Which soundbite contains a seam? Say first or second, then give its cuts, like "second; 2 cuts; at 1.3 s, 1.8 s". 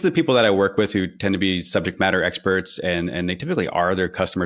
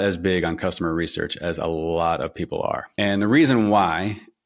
second; 1 cut; at 2.9 s